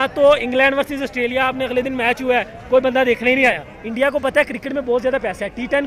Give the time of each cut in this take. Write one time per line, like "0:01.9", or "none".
0:03.7